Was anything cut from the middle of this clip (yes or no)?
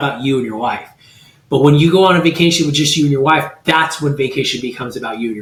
no